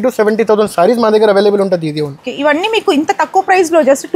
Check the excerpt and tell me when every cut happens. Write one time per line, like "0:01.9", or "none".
none

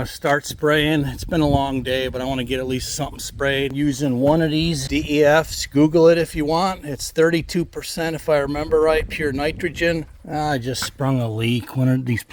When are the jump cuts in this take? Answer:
0:03.7
0:04.8
0:10.2

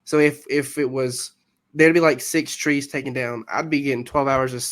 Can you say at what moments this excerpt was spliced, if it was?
none

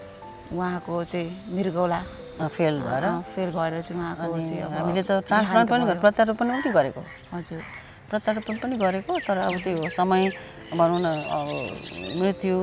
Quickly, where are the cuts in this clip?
none

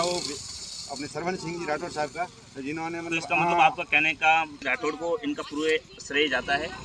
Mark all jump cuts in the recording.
0:04.6

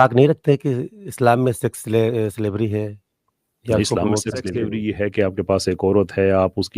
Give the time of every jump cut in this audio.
0:04.7

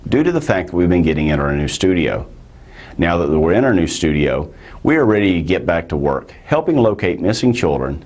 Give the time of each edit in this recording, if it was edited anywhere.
0:03.7

